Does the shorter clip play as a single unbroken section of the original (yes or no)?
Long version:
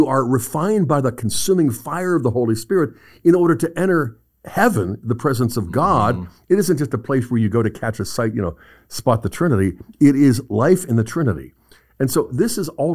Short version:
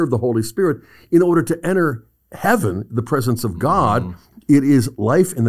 no